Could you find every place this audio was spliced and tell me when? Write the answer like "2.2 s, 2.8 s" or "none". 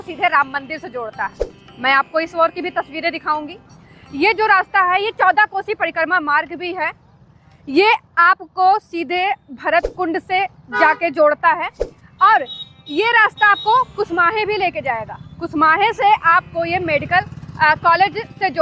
none